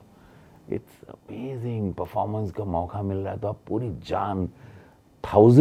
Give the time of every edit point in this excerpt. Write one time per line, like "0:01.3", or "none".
none